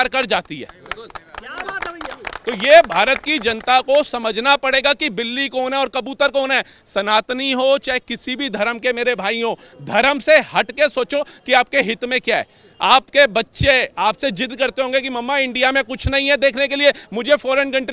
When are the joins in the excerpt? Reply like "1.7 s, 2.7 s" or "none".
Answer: none